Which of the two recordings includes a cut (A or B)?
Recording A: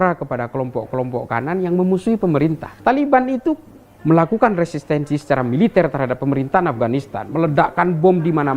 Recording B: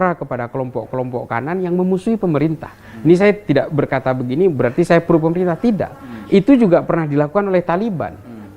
A